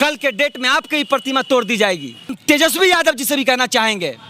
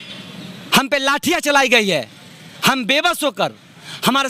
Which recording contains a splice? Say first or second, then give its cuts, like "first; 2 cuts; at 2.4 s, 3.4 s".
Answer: first; 1 cut; at 2.4 s